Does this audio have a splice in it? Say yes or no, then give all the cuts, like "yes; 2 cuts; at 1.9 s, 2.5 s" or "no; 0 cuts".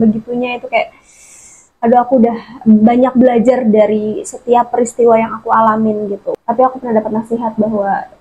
yes; 1 cut; at 6.3 s